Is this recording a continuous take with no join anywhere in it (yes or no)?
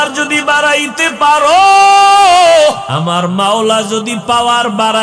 no